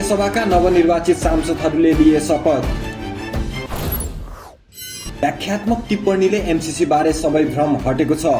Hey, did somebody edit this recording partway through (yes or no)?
no